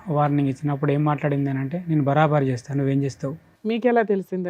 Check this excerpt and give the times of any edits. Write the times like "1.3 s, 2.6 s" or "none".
3.5 s